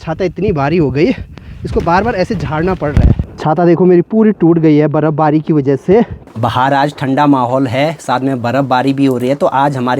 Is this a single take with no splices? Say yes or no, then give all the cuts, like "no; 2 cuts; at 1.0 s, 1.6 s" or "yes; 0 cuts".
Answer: no; 2 cuts; at 3.3 s, 6.3 s